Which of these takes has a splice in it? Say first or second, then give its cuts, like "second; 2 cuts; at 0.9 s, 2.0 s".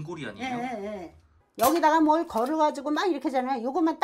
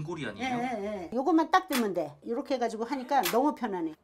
second; 1 cut; at 1.1 s